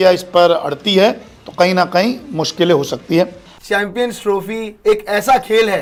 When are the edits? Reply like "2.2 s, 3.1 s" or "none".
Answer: none